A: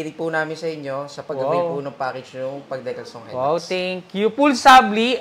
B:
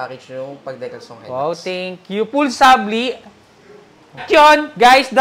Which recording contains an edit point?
B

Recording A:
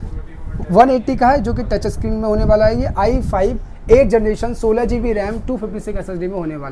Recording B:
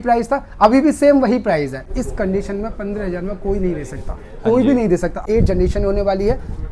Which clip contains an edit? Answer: B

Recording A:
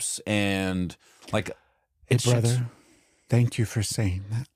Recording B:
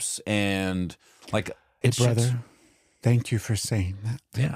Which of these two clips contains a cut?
B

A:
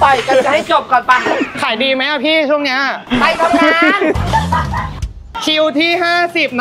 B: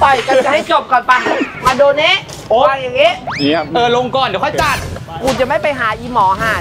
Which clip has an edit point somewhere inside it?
B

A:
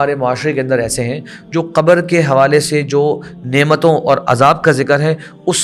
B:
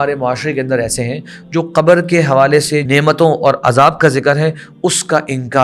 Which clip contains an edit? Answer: B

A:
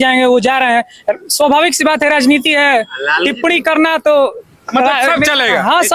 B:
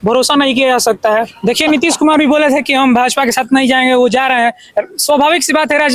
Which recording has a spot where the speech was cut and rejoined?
B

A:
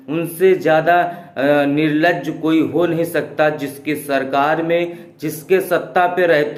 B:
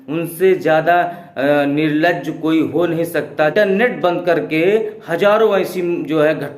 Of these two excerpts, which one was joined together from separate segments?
B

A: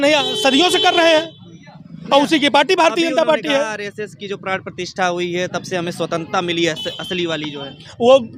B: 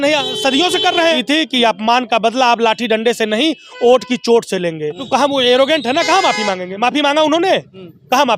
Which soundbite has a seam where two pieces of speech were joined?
B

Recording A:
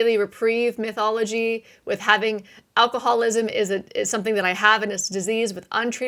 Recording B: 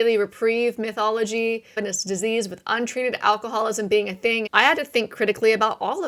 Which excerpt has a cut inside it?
B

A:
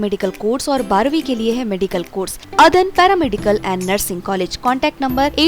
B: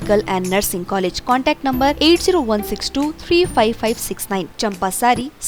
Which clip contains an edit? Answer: A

